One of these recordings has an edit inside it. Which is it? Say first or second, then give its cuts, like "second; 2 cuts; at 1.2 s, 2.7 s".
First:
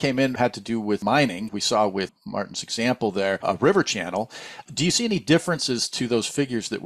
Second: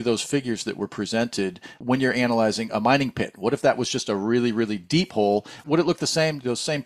second; 1 cut; at 1.8 s